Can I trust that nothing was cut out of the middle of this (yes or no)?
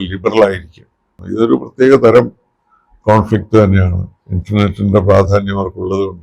no